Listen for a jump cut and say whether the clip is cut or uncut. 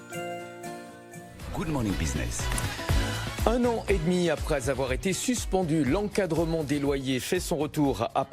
cut